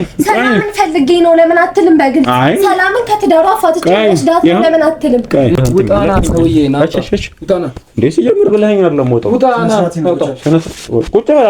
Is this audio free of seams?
no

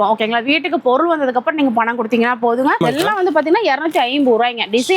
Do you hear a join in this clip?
yes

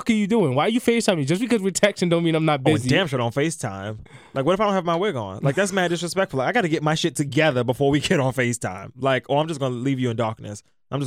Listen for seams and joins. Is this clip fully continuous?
yes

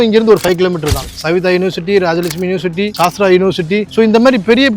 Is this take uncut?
no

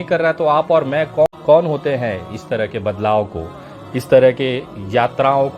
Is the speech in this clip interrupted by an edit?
yes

